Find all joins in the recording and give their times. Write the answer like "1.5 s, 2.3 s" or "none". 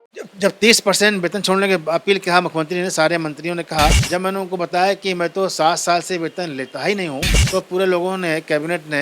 4.0 s, 7.4 s